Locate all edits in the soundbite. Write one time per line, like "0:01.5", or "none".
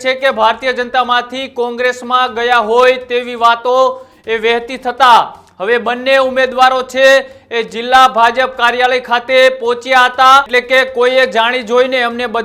0:10.5